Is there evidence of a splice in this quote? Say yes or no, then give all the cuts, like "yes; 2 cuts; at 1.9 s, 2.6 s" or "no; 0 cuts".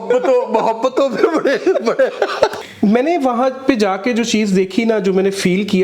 yes; 1 cut; at 2.5 s